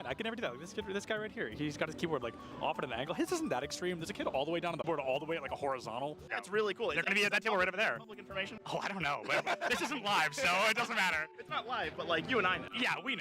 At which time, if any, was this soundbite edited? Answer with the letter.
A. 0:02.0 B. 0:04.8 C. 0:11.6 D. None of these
B